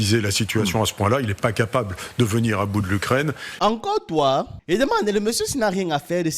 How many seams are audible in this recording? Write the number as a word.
one